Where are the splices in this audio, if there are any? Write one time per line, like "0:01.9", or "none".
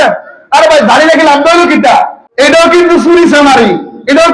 0:02.2